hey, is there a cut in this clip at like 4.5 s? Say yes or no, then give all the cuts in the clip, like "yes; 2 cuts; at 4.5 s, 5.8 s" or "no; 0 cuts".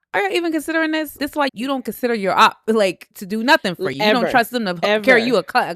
no; 2 cuts; at 1.2 s, 3.1 s